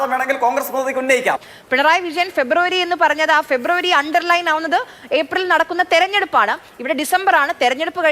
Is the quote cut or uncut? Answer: cut